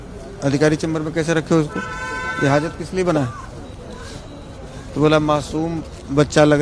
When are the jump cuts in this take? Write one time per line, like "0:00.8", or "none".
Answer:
none